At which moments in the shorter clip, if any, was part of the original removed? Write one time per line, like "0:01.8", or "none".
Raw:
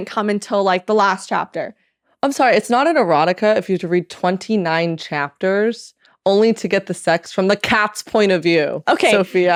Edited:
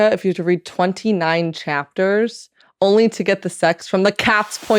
none